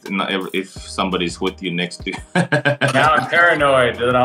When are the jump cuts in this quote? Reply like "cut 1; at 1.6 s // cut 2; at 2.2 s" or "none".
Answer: none